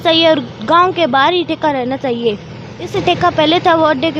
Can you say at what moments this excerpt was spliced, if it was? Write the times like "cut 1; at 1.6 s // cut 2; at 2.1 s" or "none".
cut 1; at 2.9 s